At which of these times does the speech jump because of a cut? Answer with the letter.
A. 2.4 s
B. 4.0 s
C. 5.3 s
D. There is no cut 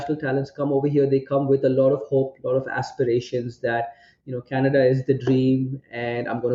D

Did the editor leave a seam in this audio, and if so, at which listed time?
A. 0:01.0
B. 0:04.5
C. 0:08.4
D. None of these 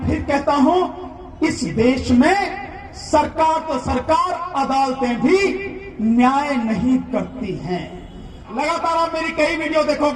C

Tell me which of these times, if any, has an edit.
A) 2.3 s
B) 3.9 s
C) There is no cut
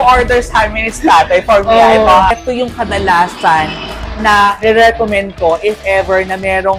A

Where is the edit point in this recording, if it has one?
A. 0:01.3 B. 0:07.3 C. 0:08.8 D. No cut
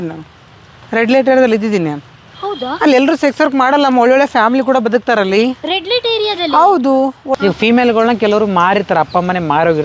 B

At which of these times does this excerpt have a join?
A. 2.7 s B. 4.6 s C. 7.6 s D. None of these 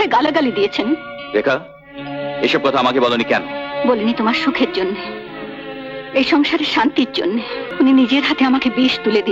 C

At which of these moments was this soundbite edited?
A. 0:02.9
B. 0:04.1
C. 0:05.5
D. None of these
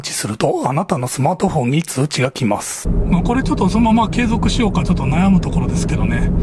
A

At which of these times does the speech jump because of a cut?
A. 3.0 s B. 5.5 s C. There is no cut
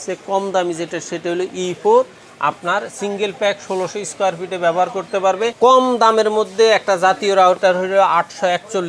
B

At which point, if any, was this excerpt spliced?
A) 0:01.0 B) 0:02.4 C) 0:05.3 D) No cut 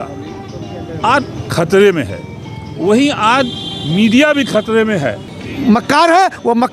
C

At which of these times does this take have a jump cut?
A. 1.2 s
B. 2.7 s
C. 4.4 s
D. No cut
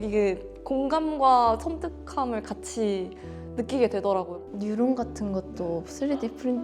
C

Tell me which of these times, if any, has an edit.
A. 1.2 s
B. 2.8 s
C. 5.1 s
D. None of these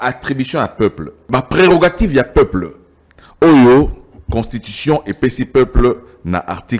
A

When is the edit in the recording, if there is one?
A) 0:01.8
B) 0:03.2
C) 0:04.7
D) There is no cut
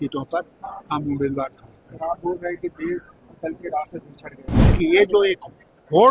C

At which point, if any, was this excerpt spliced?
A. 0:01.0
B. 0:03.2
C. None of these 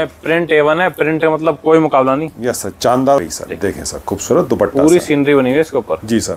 B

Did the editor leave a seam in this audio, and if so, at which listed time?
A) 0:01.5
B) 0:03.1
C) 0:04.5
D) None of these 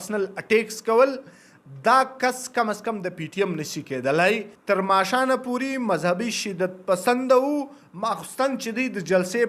C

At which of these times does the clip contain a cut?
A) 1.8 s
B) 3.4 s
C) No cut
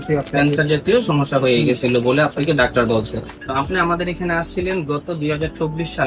B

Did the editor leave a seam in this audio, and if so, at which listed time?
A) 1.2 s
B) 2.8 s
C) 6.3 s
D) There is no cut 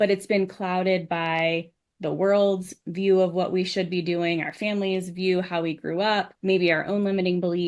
C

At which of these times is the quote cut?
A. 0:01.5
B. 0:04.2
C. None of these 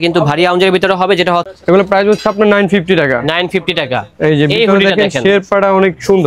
A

